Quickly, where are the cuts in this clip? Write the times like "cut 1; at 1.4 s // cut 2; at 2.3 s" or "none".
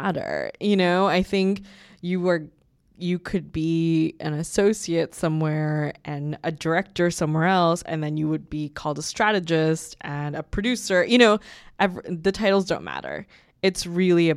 none